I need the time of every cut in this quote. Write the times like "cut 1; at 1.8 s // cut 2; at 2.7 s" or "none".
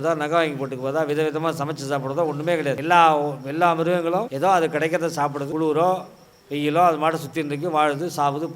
cut 1; at 2.8 s // cut 2; at 4.3 s // cut 3; at 5.4 s